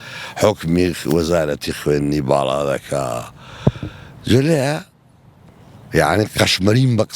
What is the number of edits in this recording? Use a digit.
0